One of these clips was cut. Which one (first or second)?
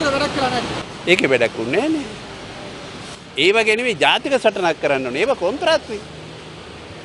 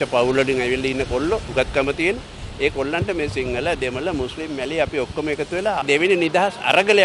second